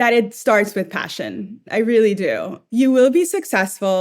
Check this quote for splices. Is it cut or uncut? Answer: cut